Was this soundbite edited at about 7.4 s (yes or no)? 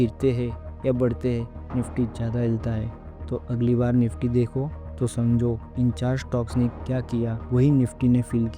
yes